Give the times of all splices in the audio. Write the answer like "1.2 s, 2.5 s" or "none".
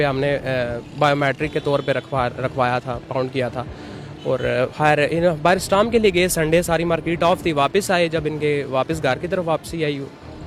none